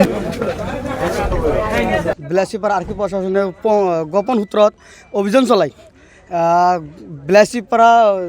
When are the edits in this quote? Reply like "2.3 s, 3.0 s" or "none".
2.2 s

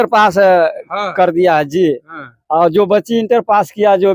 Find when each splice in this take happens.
none

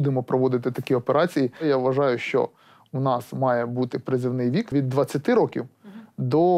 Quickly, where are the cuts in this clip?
1.6 s, 4.7 s

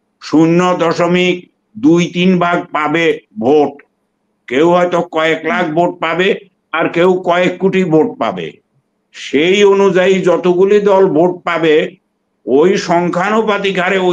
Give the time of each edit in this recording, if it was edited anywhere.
none

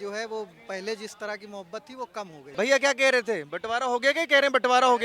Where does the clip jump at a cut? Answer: 2.4 s

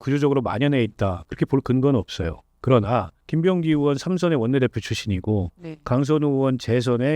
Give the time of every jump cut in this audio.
3.2 s

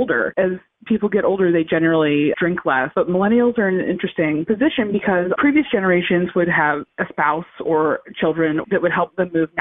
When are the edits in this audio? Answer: 8.6 s

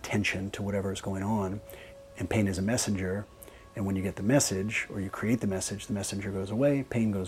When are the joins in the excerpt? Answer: none

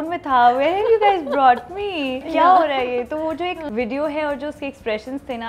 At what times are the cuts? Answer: 2.3 s, 3.6 s

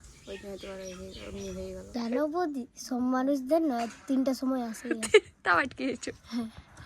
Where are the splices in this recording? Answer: 1.8 s

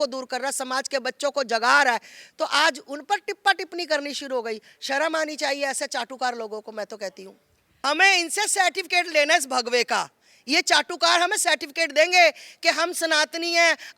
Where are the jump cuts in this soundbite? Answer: 7.8 s

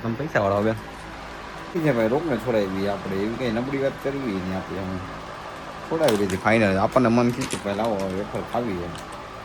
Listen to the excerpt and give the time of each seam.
1.8 s

